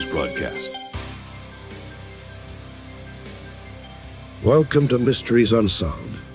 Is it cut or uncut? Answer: uncut